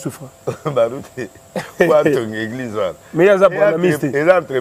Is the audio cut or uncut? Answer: uncut